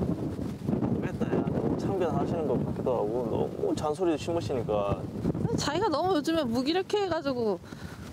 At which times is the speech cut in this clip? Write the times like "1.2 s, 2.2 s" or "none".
none